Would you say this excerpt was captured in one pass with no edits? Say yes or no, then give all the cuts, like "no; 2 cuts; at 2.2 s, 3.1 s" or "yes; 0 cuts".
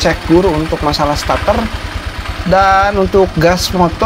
yes; 0 cuts